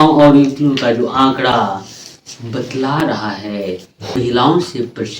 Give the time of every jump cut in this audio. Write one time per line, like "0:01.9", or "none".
0:04.2